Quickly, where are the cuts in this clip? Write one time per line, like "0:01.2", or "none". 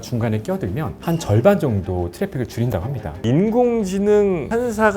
0:03.2